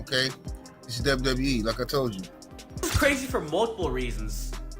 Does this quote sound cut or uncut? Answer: cut